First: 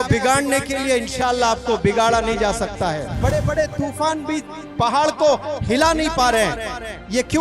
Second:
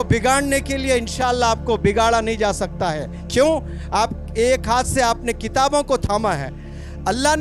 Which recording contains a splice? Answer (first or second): first